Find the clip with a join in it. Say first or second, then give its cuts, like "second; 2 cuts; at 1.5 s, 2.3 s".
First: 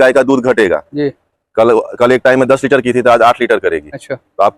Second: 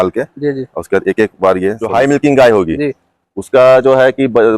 second; 1 cut; at 1.8 s